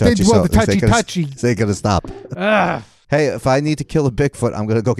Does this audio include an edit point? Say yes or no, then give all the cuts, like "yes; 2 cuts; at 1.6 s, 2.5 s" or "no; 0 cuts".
yes; 1 cut; at 2.9 s